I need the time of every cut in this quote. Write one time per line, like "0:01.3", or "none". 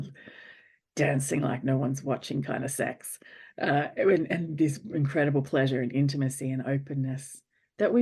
none